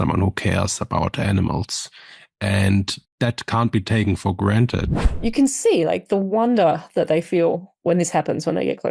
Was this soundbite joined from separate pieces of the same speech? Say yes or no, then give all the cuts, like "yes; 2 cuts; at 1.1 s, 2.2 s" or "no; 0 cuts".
yes; 2 cuts; at 3.0 s, 4.9 s